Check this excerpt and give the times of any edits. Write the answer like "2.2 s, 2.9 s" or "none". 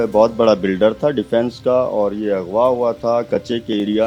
none